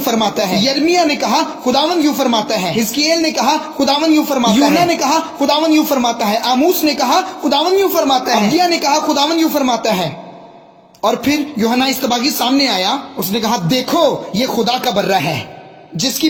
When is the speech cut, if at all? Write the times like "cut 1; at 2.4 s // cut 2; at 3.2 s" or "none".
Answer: none